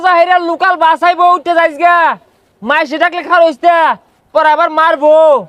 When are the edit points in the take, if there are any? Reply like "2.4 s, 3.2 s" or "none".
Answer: none